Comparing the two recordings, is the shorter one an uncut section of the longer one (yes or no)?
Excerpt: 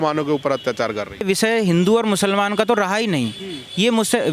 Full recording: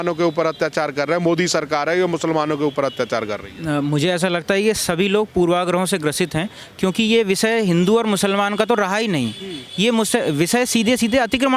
no